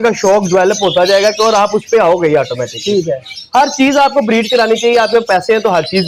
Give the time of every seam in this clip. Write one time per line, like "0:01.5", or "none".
none